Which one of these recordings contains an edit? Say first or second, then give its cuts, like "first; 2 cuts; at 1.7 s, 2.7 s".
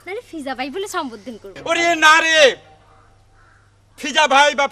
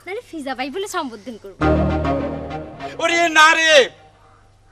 first; 1 cut; at 1.4 s